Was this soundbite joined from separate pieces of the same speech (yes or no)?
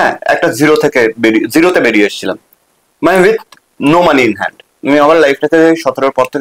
no